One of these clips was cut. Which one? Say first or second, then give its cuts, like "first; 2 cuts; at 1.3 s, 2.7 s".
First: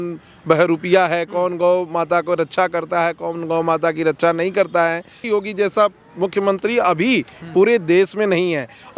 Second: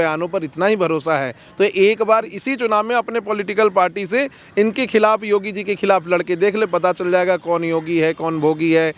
first; 1 cut; at 5.2 s